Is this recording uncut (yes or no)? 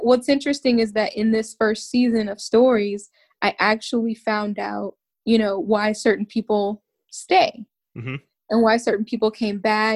yes